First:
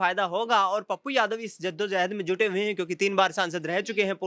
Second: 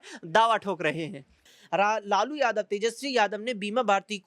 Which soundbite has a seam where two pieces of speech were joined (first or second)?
second